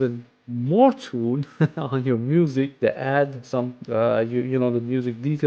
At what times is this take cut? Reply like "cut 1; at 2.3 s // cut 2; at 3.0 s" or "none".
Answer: none

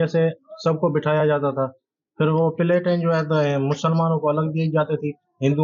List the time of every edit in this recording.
none

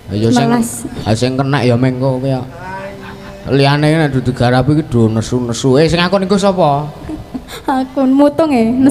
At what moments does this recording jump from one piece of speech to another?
none

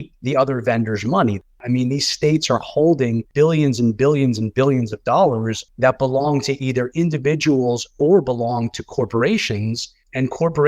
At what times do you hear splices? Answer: cut 1; at 1.5 s // cut 2; at 3.2 s // cut 3; at 5.6 s

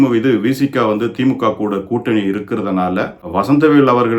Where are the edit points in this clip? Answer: cut 1; at 3.2 s

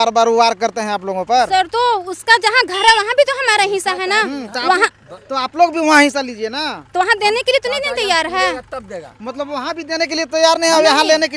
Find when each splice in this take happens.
none

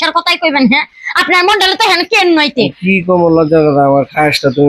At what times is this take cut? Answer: none

